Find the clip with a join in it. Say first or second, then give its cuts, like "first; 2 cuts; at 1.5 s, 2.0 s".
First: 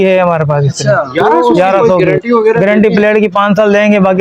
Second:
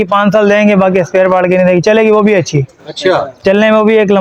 first; 1 cut; at 1.9 s